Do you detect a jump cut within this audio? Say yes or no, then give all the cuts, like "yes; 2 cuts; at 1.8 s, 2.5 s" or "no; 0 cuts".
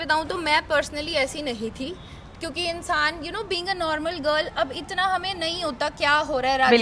no; 0 cuts